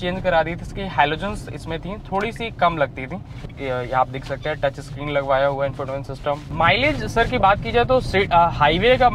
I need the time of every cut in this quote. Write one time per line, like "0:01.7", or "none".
0:03.5
0:06.5